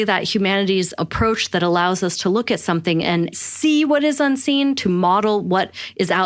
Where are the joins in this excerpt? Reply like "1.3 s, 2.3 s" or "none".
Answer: 0.9 s, 3.3 s